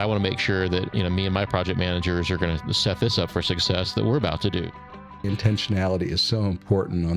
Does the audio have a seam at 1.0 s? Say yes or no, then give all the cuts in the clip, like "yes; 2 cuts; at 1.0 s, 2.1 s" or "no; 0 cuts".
no; 1 cut; at 5.2 s